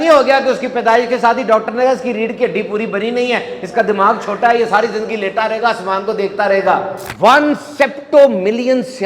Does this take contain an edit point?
yes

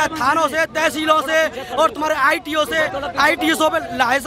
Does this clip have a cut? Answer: no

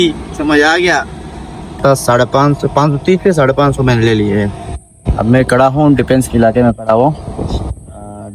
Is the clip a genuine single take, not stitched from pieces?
no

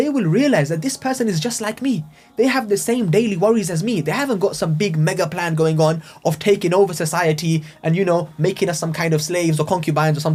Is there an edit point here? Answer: no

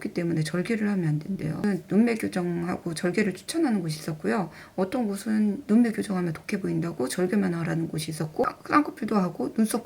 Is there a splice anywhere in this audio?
yes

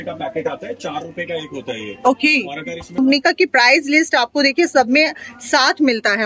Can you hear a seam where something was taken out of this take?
yes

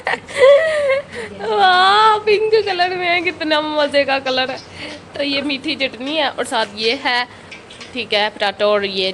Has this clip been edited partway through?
no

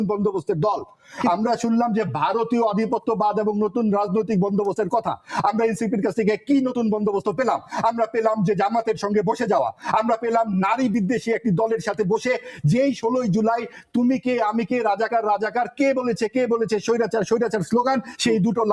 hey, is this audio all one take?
yes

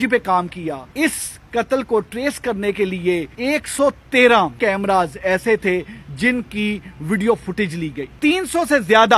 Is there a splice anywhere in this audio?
yes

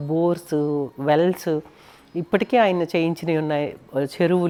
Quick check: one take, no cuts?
yes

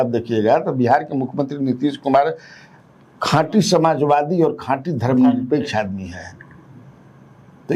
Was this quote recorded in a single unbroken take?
yes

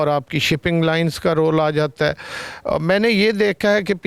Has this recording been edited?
no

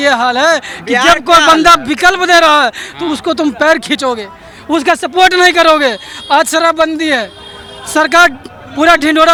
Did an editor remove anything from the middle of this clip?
no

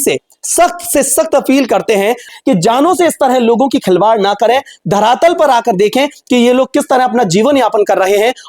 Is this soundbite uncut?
no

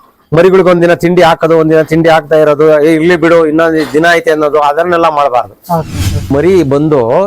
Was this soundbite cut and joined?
yes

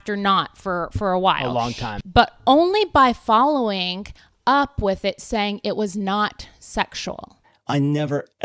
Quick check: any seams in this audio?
yes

